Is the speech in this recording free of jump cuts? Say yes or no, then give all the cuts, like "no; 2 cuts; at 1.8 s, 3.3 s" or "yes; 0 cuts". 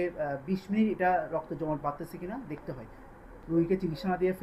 no; 1 cut; at 3.3 s